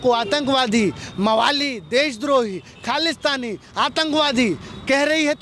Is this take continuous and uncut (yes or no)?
yes